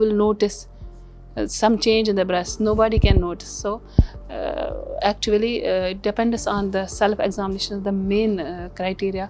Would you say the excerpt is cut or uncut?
uncut